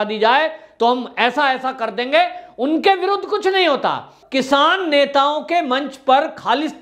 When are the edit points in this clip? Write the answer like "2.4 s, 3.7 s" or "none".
4.2 s